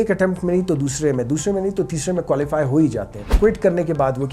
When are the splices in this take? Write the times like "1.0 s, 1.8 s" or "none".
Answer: 3.2 s